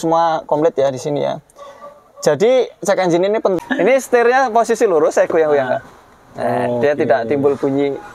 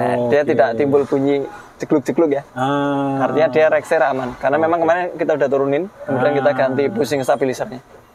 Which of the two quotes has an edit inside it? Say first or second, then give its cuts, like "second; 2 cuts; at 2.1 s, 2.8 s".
first; 1 cut; at 3.6 s